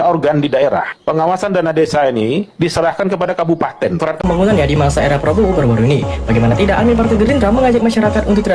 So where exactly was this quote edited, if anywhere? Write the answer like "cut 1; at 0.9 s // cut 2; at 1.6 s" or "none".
cut 1; at 4.2 s